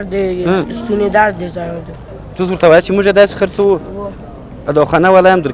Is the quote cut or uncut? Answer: cut